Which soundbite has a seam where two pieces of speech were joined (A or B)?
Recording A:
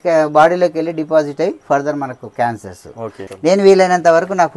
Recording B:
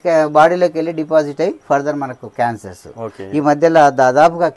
A